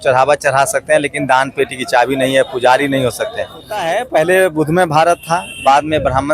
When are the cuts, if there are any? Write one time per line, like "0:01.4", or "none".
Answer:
0:03.8